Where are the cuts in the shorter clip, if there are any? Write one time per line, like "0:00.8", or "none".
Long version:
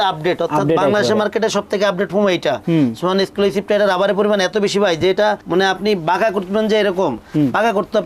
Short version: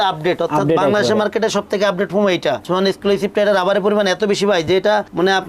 0:02.6